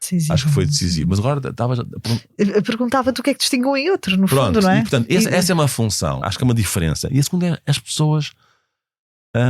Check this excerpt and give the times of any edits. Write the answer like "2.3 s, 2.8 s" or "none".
6.3 s